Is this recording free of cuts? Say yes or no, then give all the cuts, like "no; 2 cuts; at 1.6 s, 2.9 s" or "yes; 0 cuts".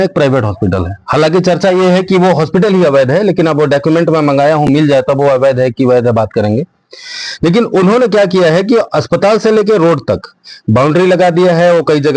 yes; 0 cuts